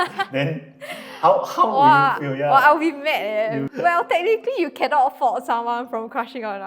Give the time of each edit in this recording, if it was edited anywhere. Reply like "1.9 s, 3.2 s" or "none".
3.6 s